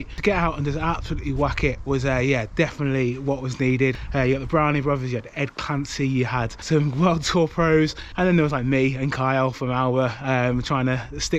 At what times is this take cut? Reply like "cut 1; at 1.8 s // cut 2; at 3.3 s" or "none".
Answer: cut 1; at 4.0 s // cut 2; at 6.6 s // cut 3; at 8.0 s